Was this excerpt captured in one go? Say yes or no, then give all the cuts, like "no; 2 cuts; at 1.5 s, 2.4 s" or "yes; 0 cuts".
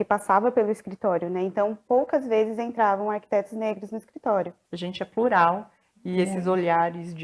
no; 1 cut; at 4.6 s